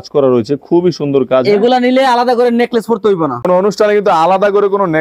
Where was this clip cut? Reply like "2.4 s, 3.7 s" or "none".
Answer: 3.5 s

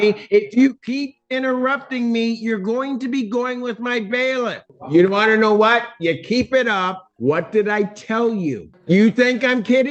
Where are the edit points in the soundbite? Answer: 4.7 s, 7.0 s, 8.7 s

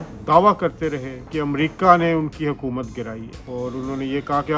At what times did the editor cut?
1.2 s

